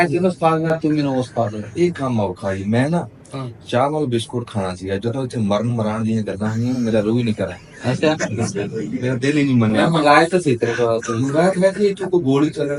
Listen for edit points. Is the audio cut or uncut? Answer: uncut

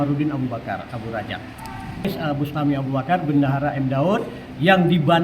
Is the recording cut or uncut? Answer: cut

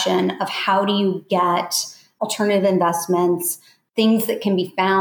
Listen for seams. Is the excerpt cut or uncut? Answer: cut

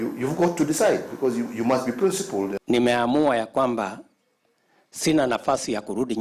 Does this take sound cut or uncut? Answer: cut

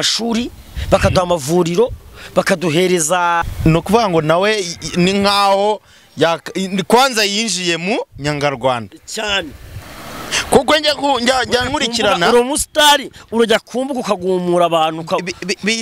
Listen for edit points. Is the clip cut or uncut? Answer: cut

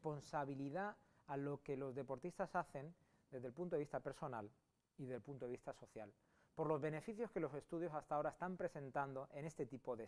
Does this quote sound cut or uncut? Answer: uncut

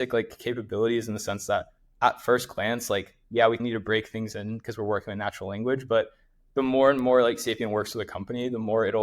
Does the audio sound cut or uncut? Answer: uncut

